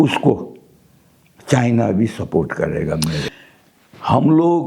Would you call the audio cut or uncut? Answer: cut